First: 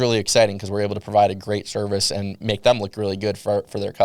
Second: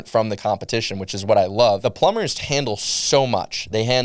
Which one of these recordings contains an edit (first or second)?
second